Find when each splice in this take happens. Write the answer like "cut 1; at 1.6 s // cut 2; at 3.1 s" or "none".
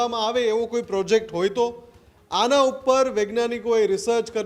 none